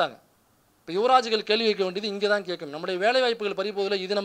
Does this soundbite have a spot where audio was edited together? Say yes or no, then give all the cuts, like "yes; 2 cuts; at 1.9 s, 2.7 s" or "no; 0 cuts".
no; 0 cuts